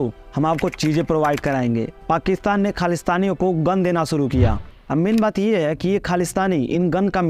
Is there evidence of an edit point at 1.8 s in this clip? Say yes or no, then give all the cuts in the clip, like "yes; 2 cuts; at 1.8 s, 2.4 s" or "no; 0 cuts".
no; 0 cuts